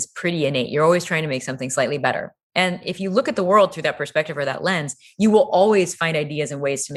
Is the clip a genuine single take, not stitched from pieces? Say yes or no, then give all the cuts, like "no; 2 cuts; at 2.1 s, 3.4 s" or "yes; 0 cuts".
yes; 0 cuts